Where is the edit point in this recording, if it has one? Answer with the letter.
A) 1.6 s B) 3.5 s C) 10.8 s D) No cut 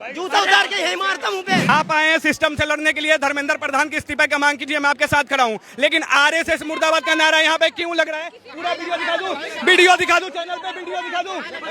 A